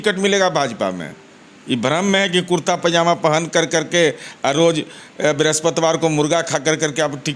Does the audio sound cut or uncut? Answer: uncut